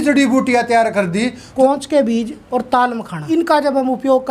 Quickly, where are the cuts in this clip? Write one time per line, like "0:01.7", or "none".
0:01.5
0:02.4
0:03.2